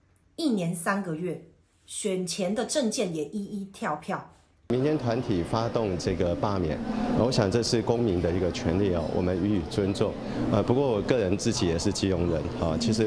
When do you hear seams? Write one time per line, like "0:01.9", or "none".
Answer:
0:04.7